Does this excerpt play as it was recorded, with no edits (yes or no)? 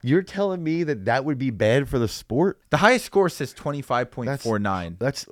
no